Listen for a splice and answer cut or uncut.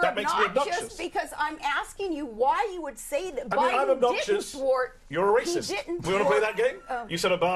cut